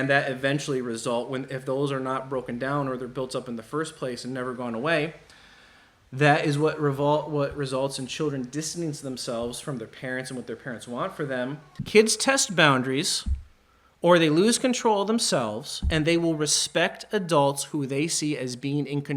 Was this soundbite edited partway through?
yes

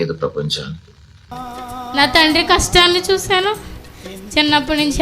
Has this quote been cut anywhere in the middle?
yes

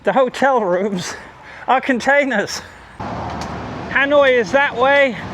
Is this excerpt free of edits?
no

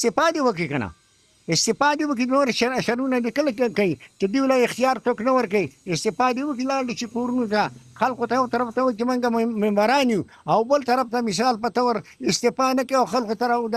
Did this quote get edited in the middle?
no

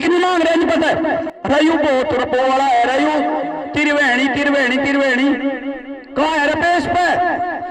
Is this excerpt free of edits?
no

